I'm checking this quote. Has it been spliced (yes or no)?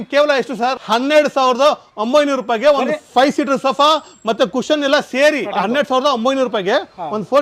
yes